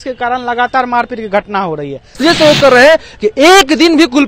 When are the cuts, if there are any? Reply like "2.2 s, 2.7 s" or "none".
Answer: 2.1 s